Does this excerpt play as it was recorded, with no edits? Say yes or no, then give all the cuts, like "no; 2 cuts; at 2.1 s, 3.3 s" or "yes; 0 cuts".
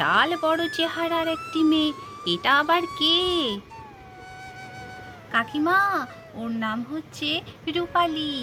yes; 0 cuts